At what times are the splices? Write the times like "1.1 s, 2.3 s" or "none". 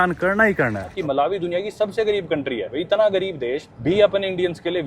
0.9 s, 2.7 s, 3.7 s